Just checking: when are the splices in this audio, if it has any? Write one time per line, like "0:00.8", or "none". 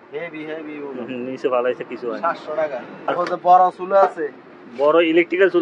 0:03.1